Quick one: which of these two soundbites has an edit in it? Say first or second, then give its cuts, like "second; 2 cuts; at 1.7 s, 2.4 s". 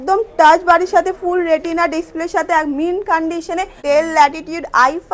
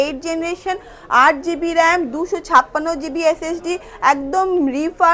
first; 1 cut; at 3.8 s